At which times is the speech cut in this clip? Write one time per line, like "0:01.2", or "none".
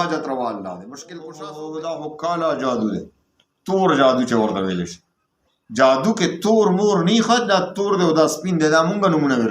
0:01.3